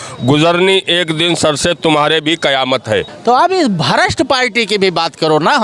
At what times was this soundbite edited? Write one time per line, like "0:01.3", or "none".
0:03.1